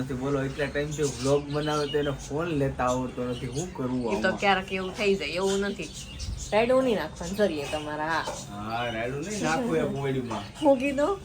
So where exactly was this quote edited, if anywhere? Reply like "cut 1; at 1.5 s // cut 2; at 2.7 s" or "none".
none